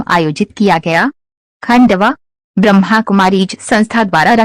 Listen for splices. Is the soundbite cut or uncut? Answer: cut